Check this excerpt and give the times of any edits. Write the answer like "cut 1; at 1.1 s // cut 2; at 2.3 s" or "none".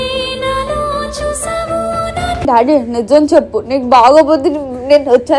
cut 1; at 2.5 s